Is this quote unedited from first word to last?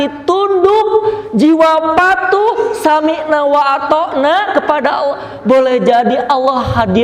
yes; 0 cuts

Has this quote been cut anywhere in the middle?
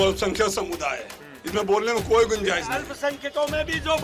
no; 0 cuts

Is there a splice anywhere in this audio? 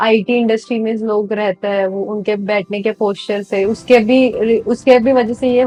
no; 0 cuts

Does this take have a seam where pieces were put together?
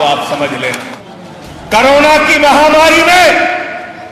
yes; 1 cut; at 0.9 s

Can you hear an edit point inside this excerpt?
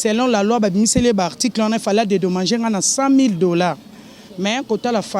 no; 0 cuts

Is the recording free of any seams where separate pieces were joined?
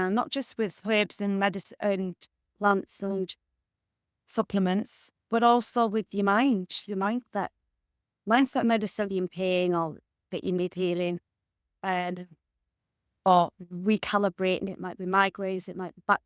no; 2 cuts; at 9.1 s, 14.7 s

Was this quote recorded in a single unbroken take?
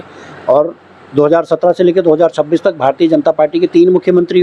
yes; 0 cuts

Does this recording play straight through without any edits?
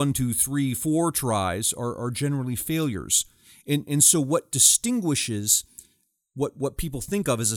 yes; 0 cuts

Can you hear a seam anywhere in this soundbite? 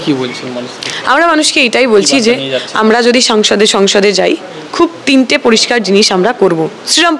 no; 0 cuts

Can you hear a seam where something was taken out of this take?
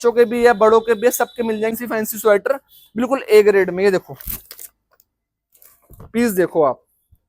yes; 1 cut; at 1.7 s

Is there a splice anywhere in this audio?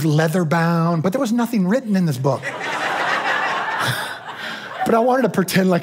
no; 0 cuts

